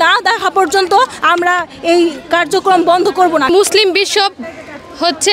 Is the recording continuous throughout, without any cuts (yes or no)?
no